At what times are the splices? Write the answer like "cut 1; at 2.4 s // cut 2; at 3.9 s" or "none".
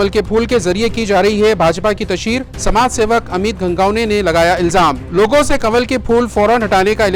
none